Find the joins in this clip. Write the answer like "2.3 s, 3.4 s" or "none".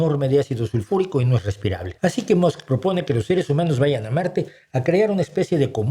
1.9 s